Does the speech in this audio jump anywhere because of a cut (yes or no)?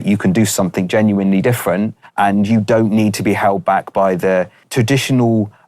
yes